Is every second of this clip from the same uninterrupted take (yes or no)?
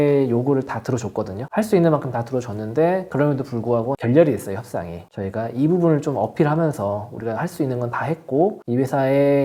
yes